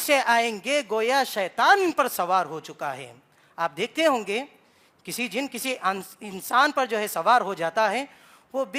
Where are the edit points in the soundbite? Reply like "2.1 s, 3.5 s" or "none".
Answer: none